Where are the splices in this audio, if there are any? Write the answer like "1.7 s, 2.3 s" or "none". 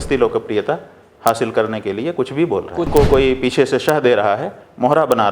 2.9 s